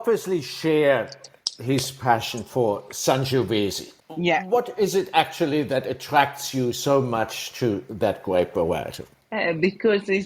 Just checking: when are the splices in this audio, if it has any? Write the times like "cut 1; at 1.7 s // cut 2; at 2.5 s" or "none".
none